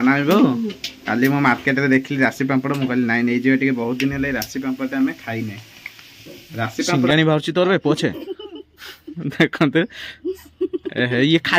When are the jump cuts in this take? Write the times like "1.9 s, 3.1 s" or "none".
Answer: 6.9 s